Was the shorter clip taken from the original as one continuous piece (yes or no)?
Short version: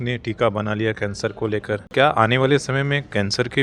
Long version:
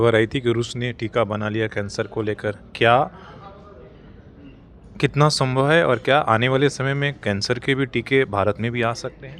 no